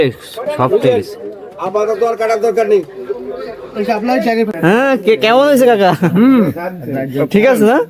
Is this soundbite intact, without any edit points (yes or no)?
no